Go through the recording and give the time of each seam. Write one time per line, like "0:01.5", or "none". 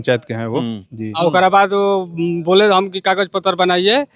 0:01.0